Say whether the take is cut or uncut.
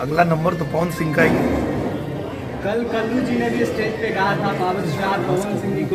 uncut